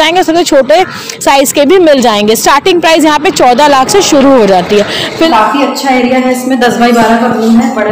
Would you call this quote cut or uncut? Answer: cut